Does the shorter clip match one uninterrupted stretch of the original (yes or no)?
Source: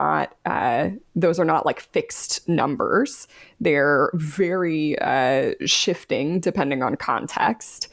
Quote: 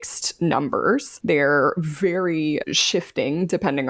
no